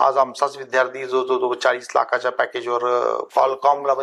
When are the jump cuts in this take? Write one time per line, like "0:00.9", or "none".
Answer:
none